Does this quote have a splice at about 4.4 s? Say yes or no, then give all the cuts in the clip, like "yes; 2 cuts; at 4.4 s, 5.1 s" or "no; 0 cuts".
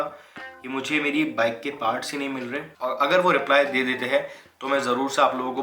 no; 1 cut; at 2.7 s